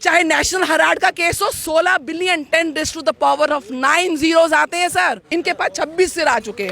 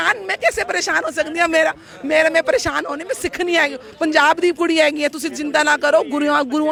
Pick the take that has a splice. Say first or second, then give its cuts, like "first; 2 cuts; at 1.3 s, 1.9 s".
first; 1 cut; at 5.2 s